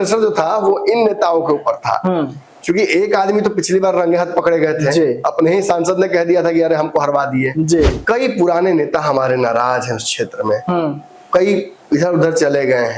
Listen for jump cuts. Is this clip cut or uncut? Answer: cut